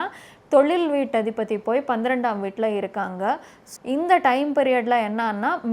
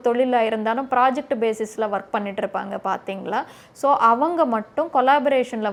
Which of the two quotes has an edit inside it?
first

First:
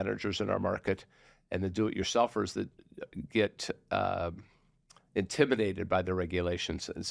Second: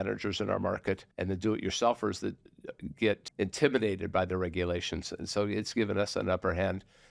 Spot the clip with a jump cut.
second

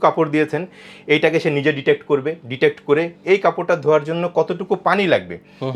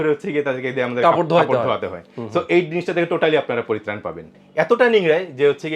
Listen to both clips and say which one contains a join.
second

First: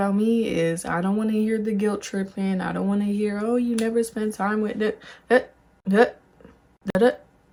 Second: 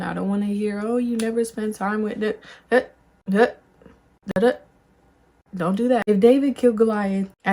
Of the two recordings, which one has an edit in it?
second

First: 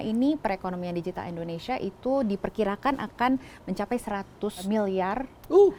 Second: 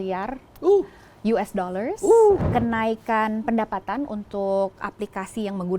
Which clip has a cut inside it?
second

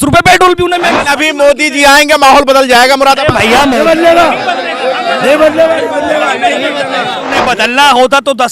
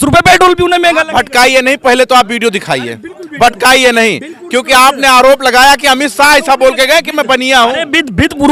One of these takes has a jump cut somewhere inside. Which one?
first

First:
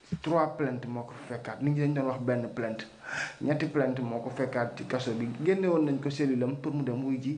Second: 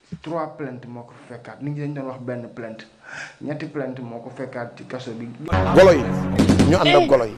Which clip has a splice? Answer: second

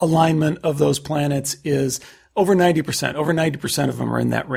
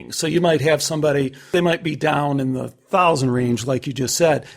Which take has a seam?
second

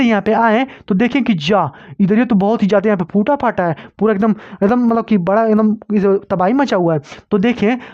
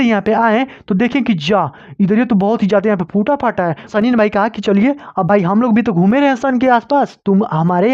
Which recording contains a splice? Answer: second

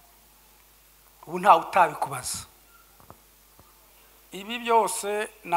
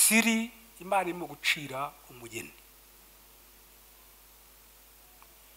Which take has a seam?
first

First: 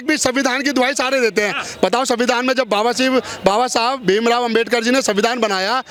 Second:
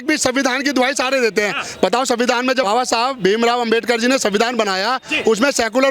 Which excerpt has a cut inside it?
second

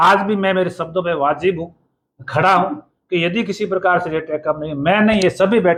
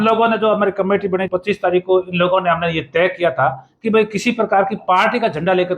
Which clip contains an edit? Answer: second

